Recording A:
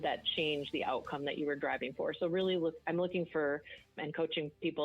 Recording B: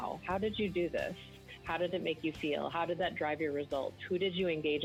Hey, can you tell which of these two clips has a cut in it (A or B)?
A